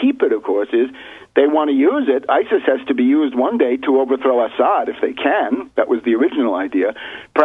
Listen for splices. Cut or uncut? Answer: uncut